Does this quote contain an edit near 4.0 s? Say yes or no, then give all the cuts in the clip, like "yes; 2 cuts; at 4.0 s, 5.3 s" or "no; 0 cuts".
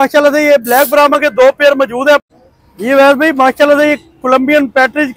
no; 1 cut; at 2.2 s